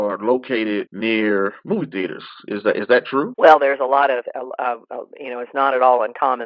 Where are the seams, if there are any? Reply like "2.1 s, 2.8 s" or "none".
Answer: 0.9 s, 3.3 s